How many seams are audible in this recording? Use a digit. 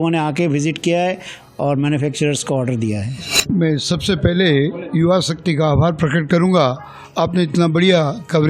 1